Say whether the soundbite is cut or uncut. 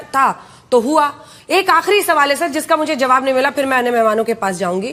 uncut